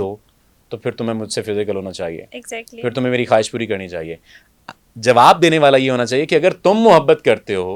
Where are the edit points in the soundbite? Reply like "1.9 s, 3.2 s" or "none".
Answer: none